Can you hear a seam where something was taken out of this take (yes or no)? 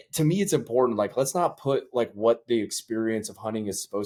no